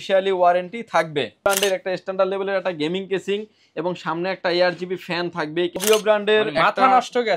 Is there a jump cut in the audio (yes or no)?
yes